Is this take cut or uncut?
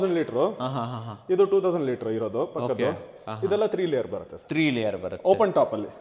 uncut